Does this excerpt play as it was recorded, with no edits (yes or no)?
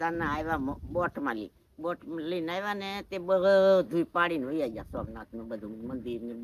yes